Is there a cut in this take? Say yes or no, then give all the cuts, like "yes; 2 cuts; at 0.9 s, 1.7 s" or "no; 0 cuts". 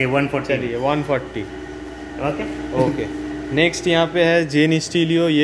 no; 0 cuts